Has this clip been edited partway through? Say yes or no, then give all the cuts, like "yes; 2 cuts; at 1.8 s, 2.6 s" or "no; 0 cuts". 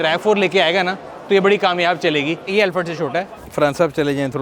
yes; 2 cuts; at 2.5 s, 3.4 s